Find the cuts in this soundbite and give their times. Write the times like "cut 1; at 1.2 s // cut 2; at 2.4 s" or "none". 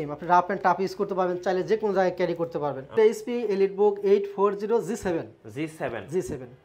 cut 1; at 2.9 s